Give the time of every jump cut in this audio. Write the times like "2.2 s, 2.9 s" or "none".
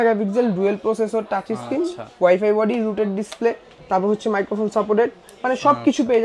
none